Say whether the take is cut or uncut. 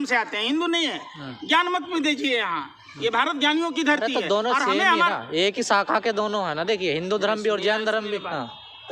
uncut